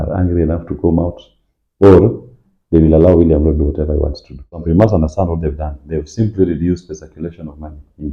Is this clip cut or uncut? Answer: cut